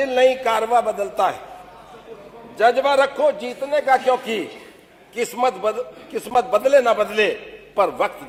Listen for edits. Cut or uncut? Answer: uncut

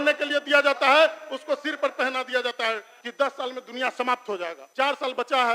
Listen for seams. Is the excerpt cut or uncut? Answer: cut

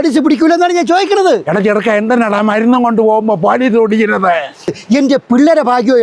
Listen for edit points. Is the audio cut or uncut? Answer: cut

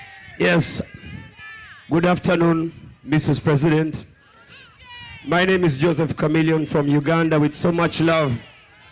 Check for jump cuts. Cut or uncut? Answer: uncut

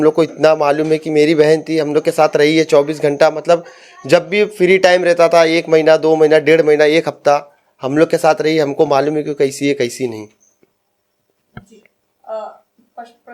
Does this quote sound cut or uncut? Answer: uncut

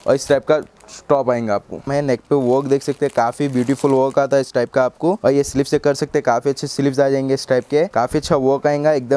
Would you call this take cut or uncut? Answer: cut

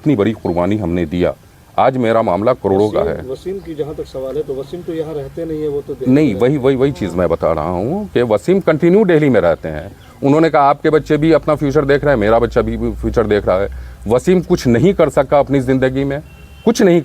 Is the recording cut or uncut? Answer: uncut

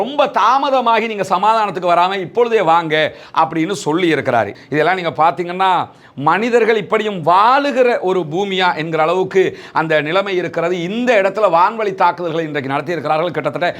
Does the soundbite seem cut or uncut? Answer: cut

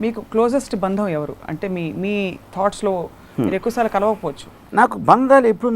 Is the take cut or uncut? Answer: uncut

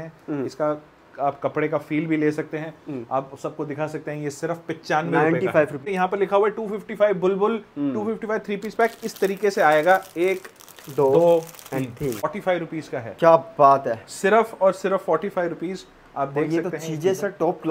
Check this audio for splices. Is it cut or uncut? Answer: cut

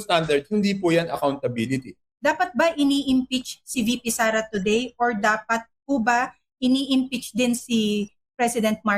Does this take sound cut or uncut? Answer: cut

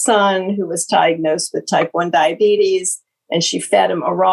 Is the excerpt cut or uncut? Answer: uncut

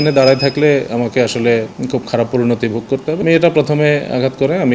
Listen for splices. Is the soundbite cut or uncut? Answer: cut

